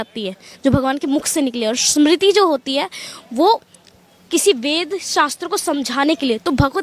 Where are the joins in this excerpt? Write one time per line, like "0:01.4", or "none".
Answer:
none

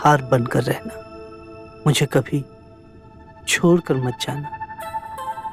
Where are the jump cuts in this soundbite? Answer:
none

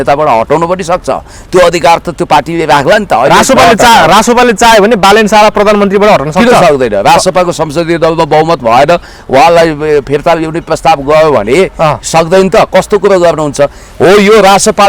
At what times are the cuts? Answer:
none

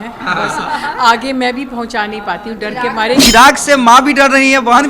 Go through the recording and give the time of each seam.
0:03.2

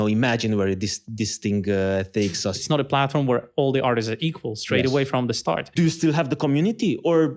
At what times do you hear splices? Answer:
0:02.6
0:05.7

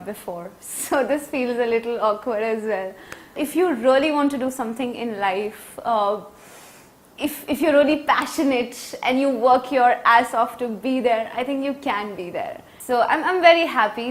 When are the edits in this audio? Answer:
0:03.4
0:12.7

